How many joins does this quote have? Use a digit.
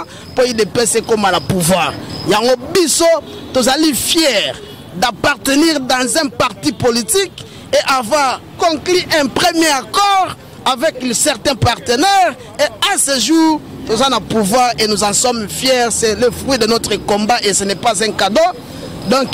0